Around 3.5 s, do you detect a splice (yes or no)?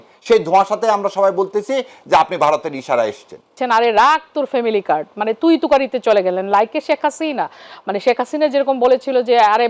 yes